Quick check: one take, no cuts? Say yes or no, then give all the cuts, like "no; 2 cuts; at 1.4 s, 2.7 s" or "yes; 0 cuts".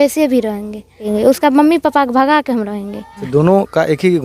no; 2 cuts; at 1.0 s, 3.2 s